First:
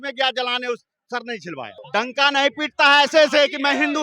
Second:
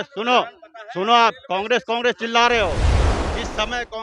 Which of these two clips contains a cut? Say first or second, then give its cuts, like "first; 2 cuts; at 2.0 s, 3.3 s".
first; 1 cut; at 1.8 s